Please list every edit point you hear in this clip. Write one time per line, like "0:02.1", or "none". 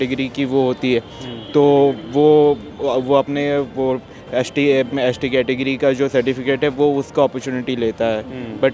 none